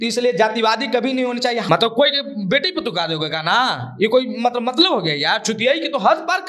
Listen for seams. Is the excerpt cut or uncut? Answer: cut